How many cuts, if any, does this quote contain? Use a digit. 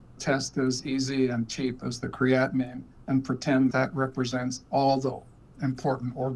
1